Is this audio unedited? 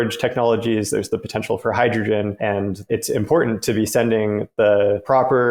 yes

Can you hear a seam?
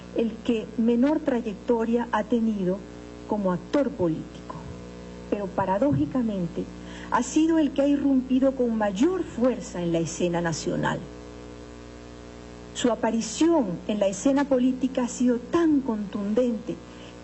yes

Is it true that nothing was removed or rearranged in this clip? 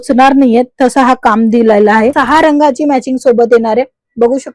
no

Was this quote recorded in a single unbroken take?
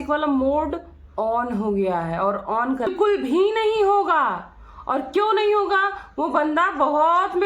no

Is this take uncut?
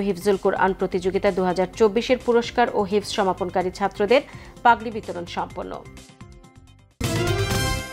no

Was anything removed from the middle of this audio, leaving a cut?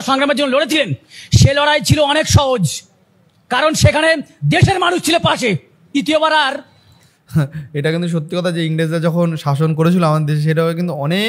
no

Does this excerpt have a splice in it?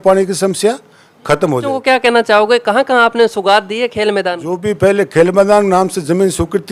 yes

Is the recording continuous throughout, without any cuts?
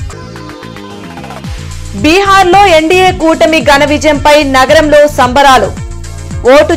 no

